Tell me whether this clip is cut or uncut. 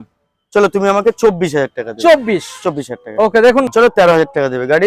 cut